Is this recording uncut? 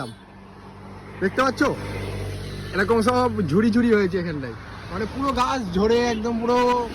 yes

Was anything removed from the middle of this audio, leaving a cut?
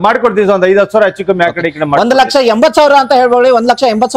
no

